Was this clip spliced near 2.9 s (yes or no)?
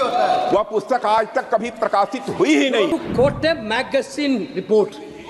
yes